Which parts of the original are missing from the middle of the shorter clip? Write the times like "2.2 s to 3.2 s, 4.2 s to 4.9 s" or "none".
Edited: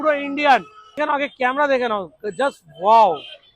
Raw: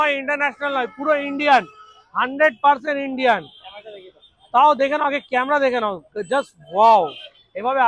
2.0 s to 4.9 s